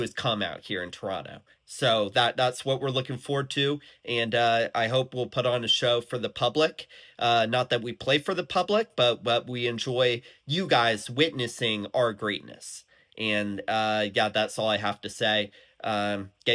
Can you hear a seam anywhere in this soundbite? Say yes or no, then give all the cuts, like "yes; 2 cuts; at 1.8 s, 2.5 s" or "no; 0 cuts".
no; 0 cuts